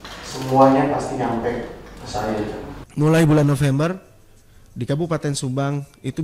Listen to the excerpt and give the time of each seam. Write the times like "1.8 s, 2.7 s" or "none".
2.8 s